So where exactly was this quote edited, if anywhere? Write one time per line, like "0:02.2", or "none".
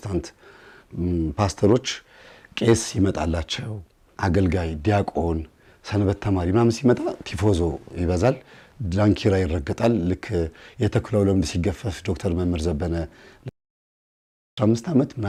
none